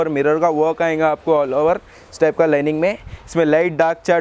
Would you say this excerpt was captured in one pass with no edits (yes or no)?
yes